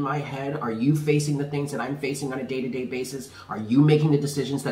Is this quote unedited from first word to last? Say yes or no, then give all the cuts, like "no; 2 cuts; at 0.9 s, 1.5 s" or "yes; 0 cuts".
yes; 0 cuts